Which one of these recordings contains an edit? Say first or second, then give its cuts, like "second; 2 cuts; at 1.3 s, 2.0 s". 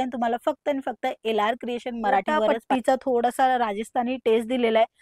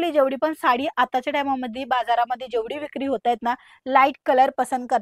first; 1 cut; at 2.6 s